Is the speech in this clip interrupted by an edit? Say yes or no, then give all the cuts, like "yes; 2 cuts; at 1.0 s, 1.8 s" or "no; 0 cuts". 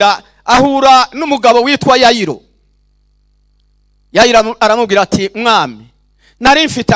no; 0 cuts